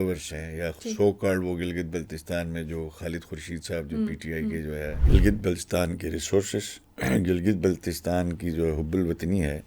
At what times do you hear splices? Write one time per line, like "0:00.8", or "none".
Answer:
0:04.9